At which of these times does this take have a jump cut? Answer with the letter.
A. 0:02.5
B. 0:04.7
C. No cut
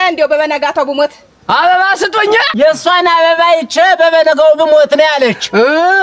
A